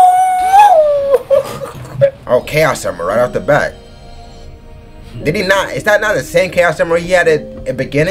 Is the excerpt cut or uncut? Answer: cut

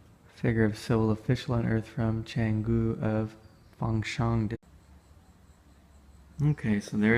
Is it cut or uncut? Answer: uncut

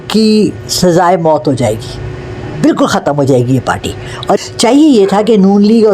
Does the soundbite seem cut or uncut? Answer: cut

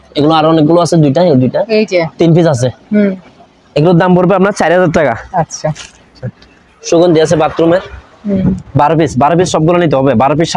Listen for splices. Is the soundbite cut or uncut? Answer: uncut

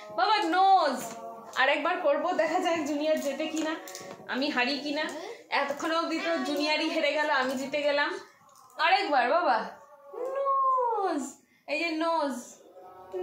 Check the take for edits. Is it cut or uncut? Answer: uncut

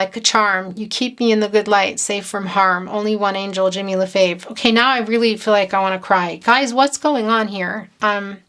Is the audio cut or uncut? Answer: uncut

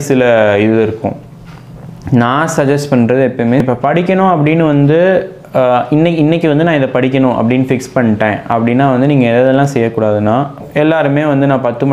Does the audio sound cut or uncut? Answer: cut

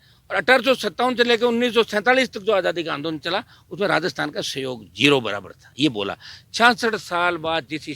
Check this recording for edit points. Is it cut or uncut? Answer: uncut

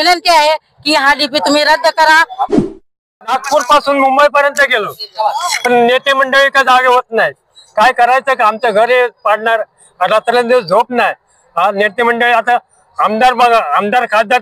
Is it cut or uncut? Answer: cut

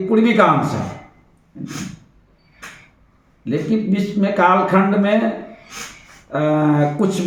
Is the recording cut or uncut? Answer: uncut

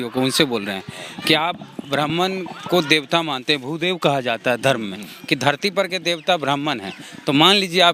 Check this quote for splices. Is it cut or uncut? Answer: uncut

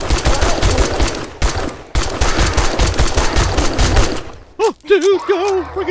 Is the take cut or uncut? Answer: uncut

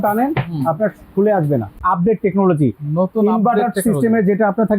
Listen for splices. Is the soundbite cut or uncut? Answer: cut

